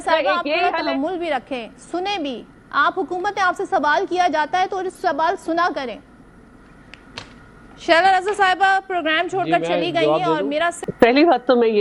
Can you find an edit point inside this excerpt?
yes; 1 cut; at 10.8 s

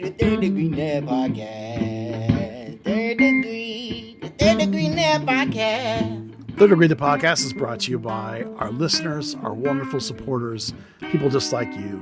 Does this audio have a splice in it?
yes; 1 cut; at 6.3 s

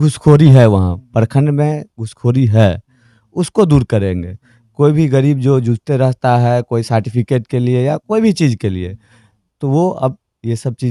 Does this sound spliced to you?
no; 0 cuts

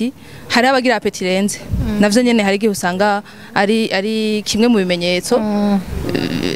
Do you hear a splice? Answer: no; 0 cuts

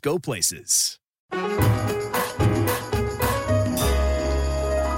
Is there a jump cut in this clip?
yes; 1 cut; at 1.4 s

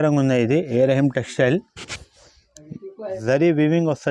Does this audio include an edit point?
yes; 1 cut; at 3.2 s

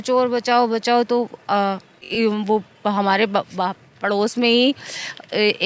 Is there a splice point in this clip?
no; 0 cuts

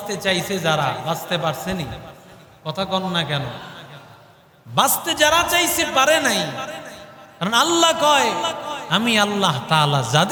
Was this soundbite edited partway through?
no; 0 cuts

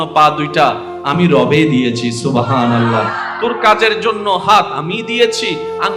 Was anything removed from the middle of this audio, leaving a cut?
no; 0 cuts

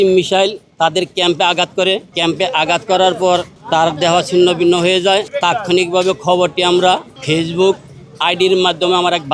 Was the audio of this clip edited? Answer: yes; 4 cuts; at 2.1 s, 3.5 s, 5.3 s, 7.1 s

